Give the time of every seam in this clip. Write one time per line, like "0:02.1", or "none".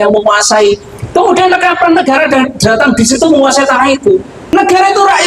0:04.4